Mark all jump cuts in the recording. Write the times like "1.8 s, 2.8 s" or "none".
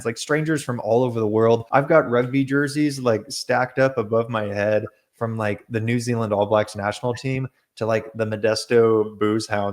1.6 s